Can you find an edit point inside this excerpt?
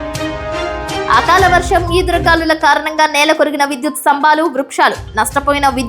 yes; 1 cut; at 1.0 s

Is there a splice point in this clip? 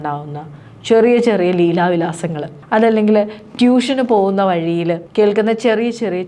no; 0 cuts

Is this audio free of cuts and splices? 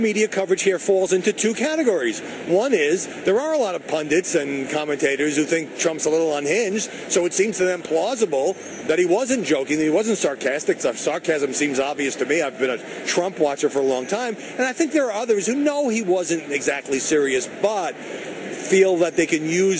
no; 1 cut; at 12.6 s

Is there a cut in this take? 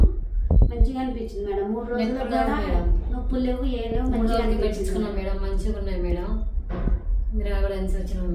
no; 0 cuts

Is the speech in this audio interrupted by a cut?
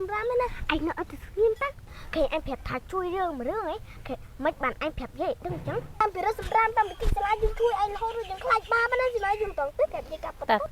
no; 0 cuts

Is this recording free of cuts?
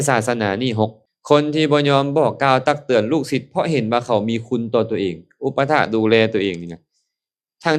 no; 1 cut; at 1.0 s

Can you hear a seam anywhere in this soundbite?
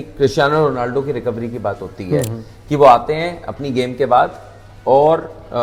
no; 0 cuts

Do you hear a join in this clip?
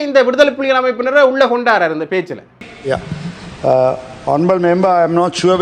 yes; 1 cut; at 2.7 s

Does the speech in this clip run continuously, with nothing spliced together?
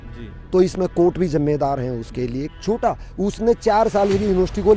no; 1 cut; at 2.5 s

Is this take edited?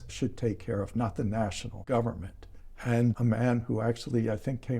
yes; 1 cut; at 3.0 s

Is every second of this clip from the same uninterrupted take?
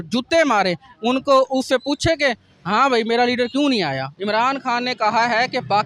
no; 1 cut; at 4.1 s

